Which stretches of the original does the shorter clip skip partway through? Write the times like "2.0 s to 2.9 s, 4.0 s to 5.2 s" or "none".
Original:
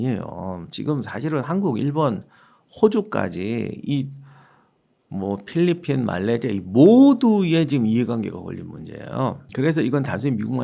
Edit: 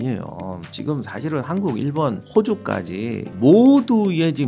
2.2 s to 2.7 s, 3.8 s to 6.6 s